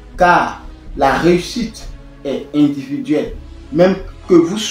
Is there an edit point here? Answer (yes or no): no